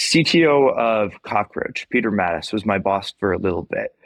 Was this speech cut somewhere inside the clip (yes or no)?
no